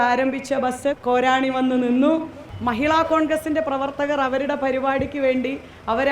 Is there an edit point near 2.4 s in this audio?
yes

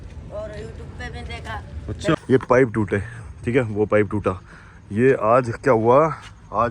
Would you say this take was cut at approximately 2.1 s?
yes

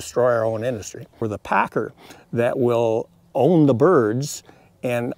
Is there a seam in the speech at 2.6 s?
no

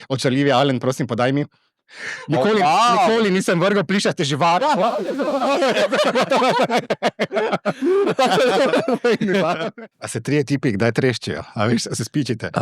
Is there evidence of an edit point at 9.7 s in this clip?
yes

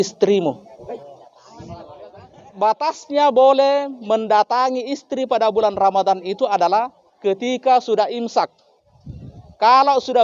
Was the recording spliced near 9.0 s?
no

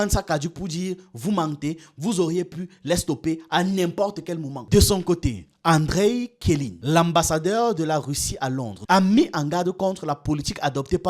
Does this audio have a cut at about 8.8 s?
yes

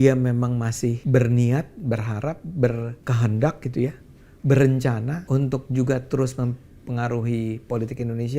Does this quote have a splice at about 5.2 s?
yes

